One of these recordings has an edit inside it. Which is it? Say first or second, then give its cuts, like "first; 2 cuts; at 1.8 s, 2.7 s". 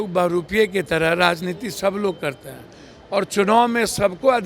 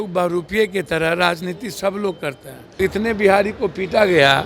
second; 1 cut; at 2.8 s